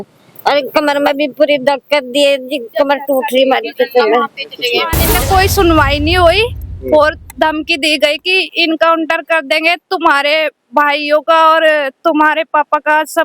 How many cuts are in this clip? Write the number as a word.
one